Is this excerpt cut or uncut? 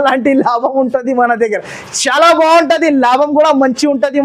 uncut